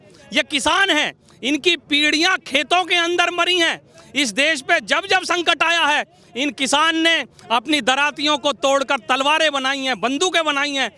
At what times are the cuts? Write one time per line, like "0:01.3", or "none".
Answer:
none